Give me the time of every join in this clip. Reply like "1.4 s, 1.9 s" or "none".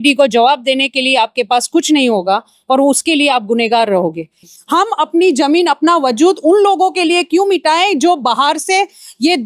4.4 s